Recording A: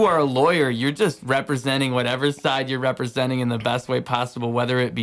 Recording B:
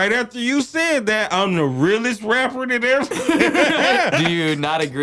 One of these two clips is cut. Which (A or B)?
B